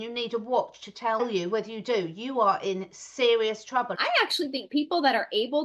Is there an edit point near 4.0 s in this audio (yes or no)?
yes